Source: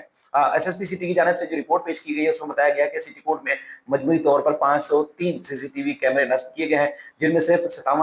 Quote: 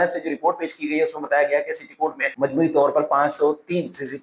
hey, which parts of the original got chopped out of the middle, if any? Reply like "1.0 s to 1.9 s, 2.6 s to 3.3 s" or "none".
3.5 s to 3.8 s

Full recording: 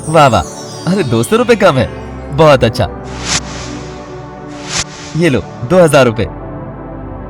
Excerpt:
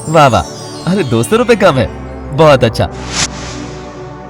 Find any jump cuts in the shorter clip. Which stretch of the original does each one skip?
2.9 s to 3.0 s

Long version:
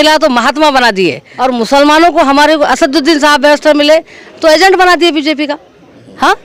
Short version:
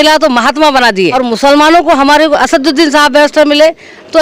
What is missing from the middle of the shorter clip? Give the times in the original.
1.1 s to 1.4 s

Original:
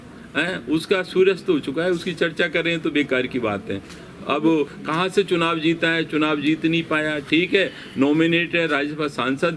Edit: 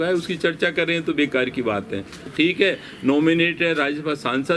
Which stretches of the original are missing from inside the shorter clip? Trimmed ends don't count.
4.0 s to 7.2 s

